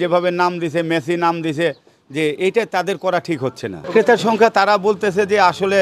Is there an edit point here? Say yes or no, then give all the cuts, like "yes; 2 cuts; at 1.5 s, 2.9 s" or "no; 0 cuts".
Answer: no; 0 cuts